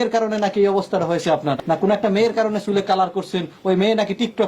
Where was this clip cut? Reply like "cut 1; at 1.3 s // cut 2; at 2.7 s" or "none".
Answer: cut 1; at 1.6 s